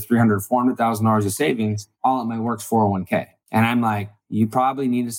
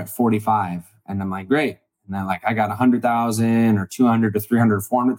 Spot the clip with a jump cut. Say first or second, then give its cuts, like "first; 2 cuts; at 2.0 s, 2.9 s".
first; 3 cuts; at 1.9 s, 3.4 s, 4.2 s